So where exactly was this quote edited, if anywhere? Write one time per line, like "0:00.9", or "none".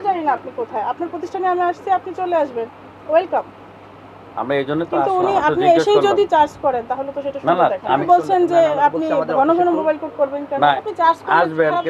0:08.0
0:10.8